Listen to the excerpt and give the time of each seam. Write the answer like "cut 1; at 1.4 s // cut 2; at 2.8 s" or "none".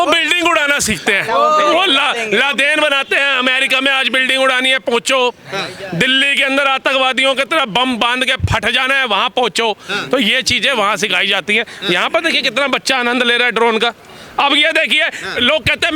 none